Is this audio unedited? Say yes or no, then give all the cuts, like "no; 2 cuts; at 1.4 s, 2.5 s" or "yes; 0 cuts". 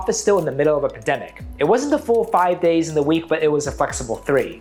yes; 0 cuts